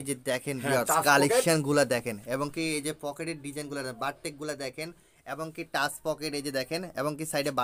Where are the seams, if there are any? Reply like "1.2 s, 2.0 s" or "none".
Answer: none